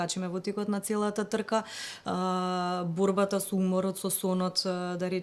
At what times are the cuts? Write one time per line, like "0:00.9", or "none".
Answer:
none